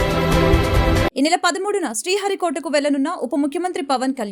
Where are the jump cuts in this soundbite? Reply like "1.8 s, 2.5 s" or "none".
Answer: 1.1 s